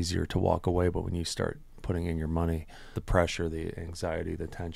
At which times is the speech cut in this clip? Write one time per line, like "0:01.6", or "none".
0:03.0